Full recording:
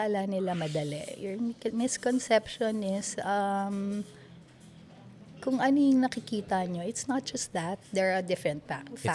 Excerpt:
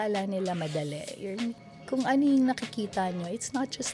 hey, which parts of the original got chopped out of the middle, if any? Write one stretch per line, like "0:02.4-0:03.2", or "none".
0:01.6-0:05.1